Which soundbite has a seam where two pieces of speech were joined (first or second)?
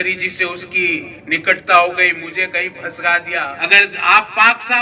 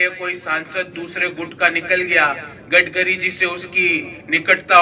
first